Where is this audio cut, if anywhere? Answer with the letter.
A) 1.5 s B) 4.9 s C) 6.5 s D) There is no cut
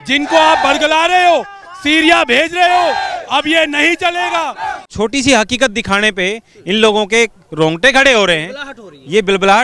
B